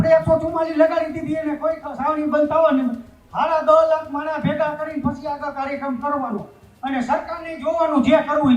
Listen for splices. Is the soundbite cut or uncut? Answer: uncut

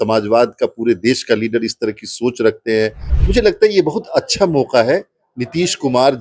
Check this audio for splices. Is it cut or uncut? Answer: cut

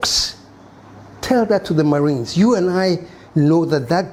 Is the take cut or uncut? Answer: uncut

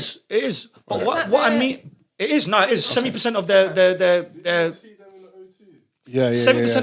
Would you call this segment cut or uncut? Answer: uncut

